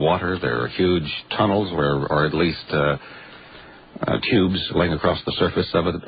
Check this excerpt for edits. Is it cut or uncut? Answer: uncut